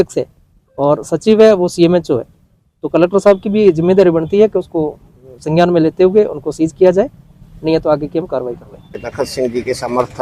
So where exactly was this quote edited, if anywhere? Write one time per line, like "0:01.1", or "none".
0:09.0